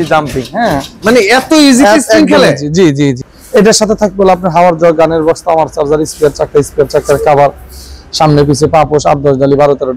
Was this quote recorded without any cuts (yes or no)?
no